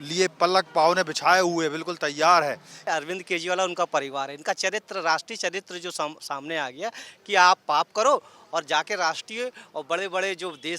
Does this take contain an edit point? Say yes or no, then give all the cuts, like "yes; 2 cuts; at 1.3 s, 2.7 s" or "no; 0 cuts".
yes; 1 cut; at 2.9 s